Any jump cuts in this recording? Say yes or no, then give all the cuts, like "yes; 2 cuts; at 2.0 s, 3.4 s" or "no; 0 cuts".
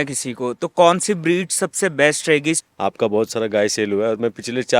yes; 1 cut; at 2.6 s